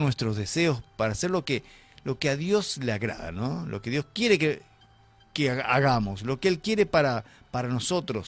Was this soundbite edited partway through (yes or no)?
no